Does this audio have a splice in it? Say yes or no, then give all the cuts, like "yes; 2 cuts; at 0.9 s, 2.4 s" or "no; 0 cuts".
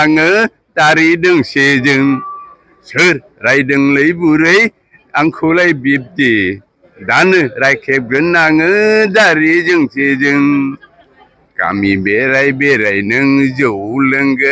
no; 0 cuts